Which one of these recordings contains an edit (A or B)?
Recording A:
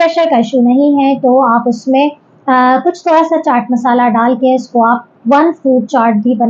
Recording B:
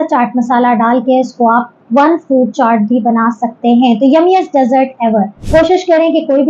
B